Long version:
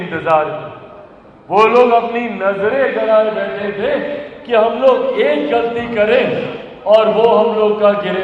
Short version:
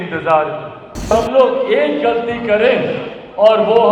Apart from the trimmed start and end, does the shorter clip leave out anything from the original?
yes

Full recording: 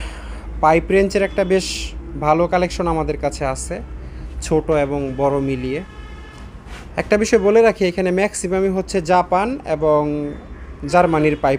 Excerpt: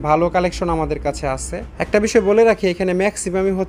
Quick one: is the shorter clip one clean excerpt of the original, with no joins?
no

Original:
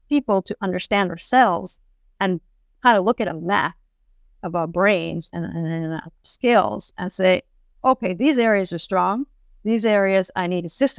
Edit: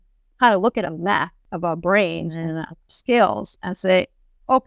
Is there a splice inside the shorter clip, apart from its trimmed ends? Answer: yes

